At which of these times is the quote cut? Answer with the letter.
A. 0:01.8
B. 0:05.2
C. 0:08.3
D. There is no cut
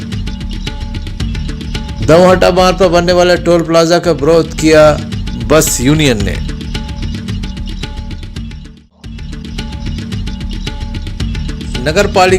A